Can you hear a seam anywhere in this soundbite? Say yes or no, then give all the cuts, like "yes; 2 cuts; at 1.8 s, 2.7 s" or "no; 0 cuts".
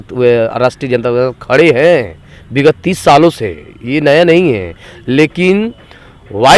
no; 0 cuts